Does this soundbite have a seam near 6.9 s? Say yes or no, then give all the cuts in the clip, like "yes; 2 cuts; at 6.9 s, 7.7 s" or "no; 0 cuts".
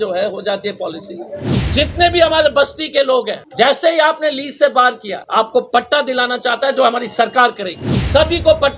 no; 3 cuts; at 1.6 s, 3.4 s, 5.1 s